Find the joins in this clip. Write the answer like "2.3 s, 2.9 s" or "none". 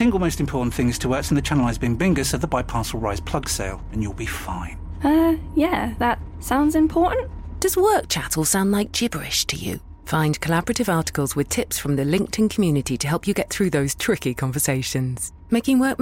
none